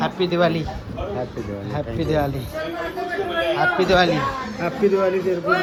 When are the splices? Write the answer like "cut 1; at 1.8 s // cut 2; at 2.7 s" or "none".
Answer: none